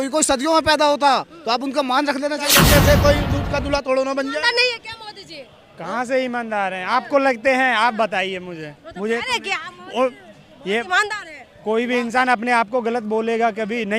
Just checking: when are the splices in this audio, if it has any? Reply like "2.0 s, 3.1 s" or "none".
2.5 s